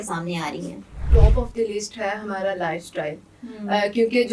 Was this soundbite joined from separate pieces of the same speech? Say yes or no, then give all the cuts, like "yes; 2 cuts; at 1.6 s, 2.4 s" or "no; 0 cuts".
yes; 1 cut; at 1.1 s